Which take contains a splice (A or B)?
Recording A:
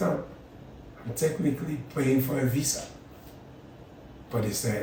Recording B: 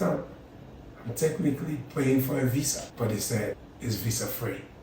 B